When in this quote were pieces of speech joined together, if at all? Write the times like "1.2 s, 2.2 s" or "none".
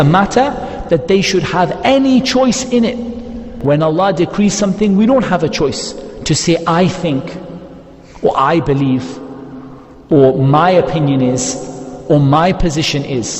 3.5 s